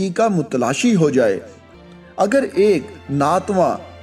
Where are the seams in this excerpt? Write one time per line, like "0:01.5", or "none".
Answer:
0:01.6